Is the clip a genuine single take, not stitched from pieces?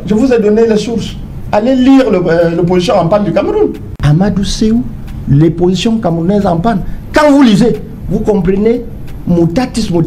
no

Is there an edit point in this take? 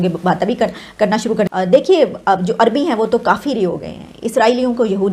yes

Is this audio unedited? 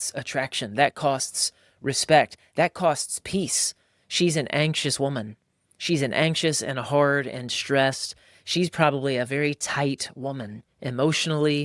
yes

